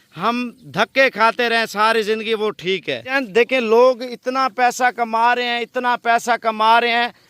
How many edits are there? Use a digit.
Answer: 1